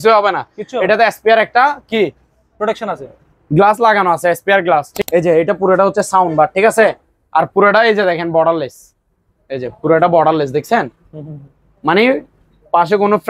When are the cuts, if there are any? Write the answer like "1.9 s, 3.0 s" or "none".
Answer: 5.0 s